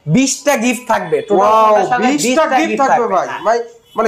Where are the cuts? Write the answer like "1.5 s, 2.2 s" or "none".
none